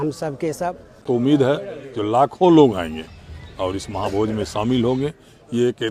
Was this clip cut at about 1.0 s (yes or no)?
yes